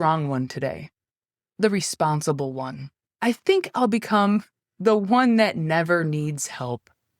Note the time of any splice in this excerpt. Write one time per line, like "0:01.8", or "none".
0:01.5
0:03.1